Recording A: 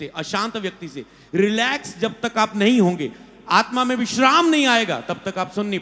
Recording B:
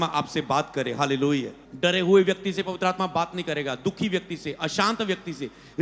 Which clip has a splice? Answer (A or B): B